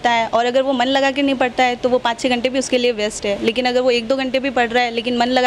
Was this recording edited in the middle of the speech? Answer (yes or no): no